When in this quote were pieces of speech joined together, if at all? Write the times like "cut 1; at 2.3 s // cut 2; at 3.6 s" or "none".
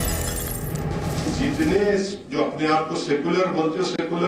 cut 1; at 1.2 s